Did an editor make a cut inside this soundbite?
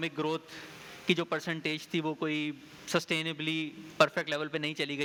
no; 0 cuts

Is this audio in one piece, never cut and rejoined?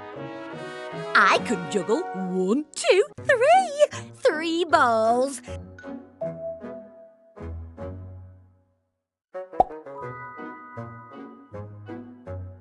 no; 1 cut; at 1.1 s

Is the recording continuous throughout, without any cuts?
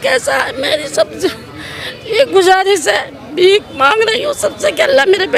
yes; 0 cuts

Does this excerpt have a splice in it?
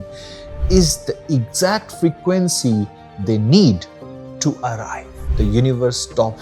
yes; 1 cut; at 5.2 s

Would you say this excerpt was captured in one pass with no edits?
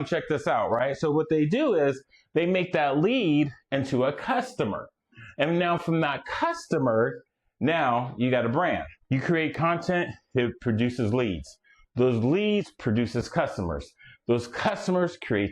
no; 1 cut; at 8.9 s

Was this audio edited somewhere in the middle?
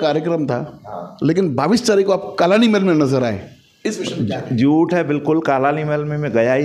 no; 0 cuts

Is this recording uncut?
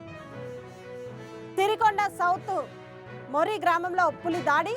no; 1 cut; at 0.9 s

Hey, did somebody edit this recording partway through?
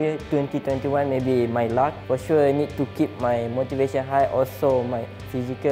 yes; 1 cut; at 2.0 s

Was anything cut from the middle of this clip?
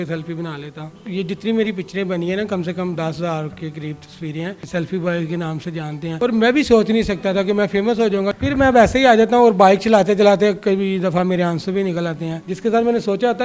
yes; 4 cuts; at 0.9 s, 4.6 s, 8.4 s, 12.4 s

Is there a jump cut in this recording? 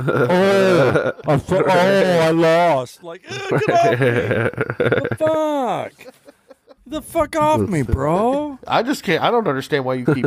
no; 0 cuts

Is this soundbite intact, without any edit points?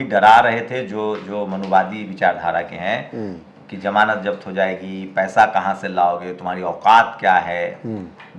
yes; 0 cuts

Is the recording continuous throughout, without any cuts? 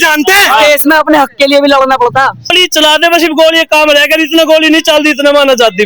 no; 1 cut; at 2.5 s

